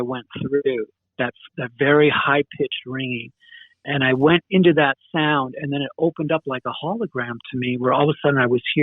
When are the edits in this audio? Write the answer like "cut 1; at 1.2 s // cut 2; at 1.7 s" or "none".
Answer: cut 1; at 3.8 s